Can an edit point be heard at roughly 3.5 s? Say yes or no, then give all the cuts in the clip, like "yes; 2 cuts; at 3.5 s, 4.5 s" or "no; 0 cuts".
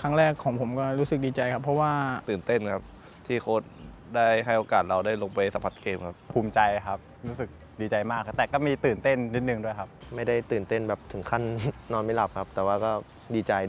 no; 3 cuts; at 2.2 s, 6.2 s, 10.0 s